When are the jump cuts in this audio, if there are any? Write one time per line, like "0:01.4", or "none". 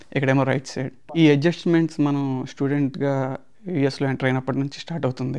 none